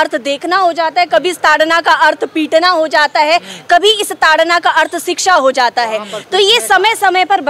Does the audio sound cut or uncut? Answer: uncut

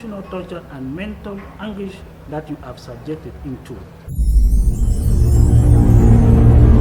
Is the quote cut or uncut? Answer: cut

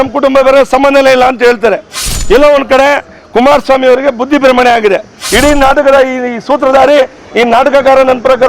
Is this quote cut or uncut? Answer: cut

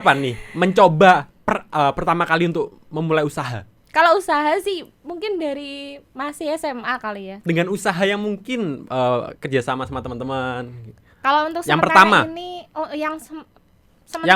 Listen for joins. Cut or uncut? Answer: uncut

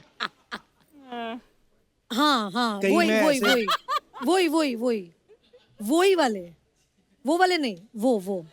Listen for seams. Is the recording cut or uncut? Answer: uncut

